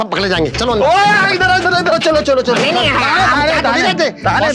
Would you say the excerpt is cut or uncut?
uncut